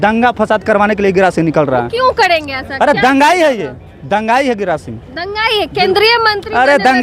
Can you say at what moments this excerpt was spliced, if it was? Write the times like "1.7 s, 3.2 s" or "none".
none